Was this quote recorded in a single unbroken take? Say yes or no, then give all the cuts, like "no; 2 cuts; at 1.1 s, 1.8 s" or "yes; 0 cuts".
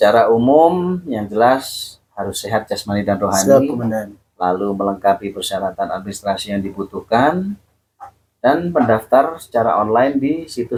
yes; 0 cuts